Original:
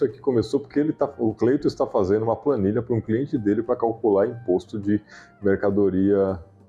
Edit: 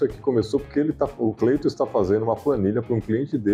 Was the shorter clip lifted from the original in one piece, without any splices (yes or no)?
yes